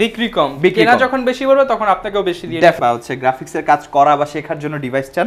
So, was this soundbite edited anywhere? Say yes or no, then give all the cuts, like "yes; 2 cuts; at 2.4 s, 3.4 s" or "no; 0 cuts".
yes; 1 cut; at 2.8 s